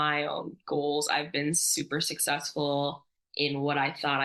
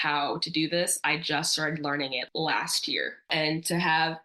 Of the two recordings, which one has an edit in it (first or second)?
second